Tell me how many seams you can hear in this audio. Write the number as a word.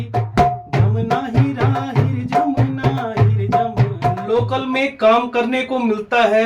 one